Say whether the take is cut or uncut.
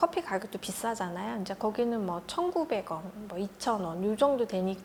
uncut